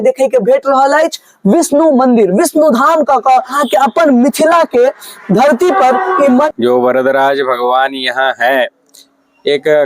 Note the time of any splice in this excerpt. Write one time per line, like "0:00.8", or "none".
0:03.6
0:06.5